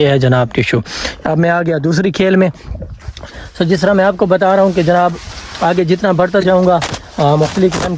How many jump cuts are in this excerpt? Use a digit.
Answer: 0